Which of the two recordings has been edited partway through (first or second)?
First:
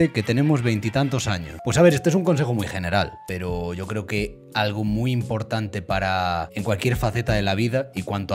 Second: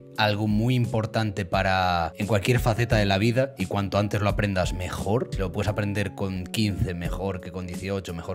first